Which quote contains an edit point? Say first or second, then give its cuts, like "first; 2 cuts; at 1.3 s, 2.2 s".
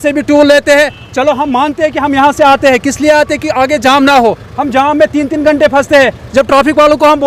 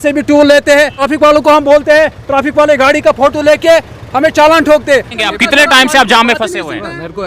second; 2 cuts; at 1.0 s, 5.2 s